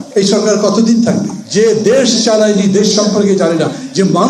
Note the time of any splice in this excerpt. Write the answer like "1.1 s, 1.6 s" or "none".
1.4 s